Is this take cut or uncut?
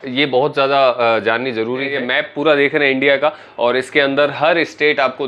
cut